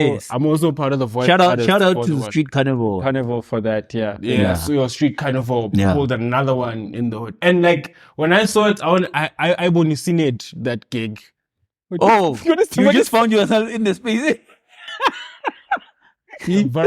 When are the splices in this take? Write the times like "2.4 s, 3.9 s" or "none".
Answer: none